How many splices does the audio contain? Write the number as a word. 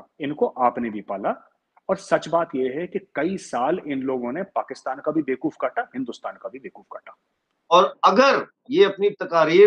one